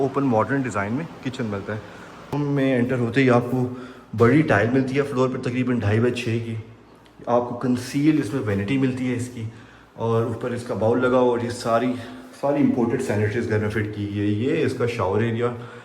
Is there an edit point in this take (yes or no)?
yes